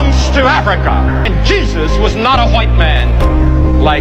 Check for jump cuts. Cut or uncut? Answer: cut